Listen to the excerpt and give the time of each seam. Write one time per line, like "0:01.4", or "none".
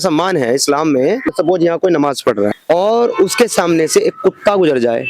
0:01.3
0:02.6